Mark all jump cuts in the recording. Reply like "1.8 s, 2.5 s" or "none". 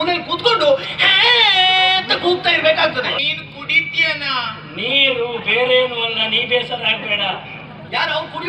3.2 s

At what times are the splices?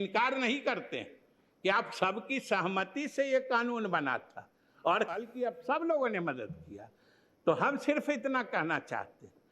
5.1 s

